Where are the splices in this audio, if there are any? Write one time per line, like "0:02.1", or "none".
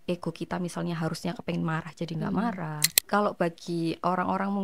0:02.8